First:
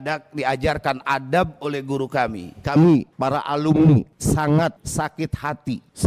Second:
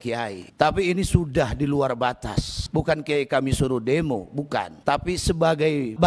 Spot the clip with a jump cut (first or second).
first